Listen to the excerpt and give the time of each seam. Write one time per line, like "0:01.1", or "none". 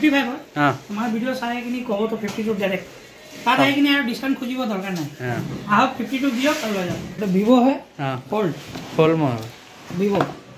0:07.1